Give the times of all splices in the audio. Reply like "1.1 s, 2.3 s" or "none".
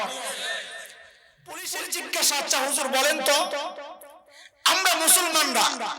1.6 s